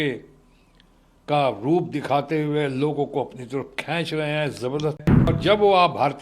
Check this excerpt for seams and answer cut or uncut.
cut